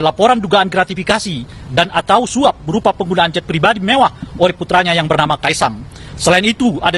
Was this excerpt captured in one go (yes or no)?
yes